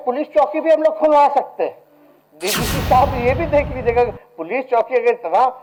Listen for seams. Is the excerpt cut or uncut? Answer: uncut